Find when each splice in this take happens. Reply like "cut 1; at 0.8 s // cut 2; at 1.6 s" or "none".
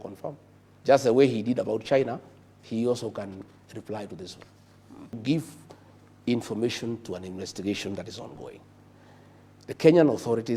cut 1; at 5.2 s